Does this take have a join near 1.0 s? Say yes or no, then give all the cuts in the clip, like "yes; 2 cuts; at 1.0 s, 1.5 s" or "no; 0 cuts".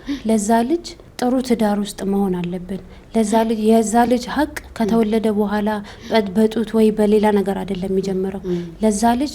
yes; 1 cut; at 1.0 s